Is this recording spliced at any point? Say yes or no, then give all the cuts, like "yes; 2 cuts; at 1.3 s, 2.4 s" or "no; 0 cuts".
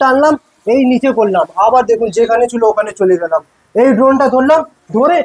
no; 0 cuts